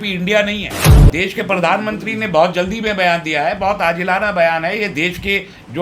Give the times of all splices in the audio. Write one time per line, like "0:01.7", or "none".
0:01.0